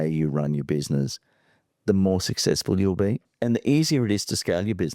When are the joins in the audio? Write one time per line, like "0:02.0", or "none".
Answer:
0:03.3